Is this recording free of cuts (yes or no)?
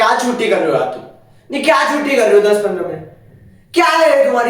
yes